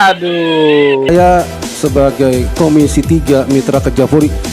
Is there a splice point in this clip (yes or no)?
yes